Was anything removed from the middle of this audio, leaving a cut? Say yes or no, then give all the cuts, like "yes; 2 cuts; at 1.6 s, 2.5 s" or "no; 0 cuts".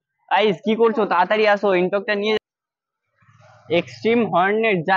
yes; 1 cut; at 2.4 s